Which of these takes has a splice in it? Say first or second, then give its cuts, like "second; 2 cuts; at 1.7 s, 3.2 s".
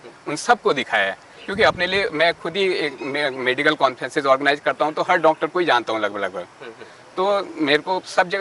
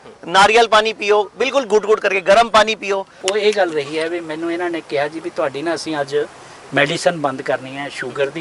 second; 1 cut; at 3.1 s